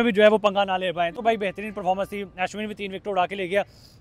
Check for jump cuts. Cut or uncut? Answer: uncut